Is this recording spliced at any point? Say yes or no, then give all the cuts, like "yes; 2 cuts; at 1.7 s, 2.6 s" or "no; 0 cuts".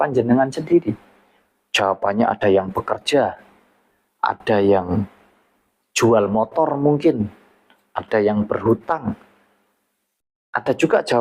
no; 0 cuts